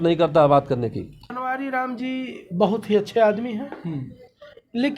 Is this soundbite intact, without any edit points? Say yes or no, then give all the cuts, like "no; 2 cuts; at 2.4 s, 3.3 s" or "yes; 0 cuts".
no; 1 cut; at 1.2 s